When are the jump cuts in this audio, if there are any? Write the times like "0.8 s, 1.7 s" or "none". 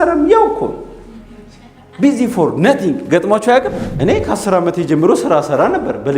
3.9 s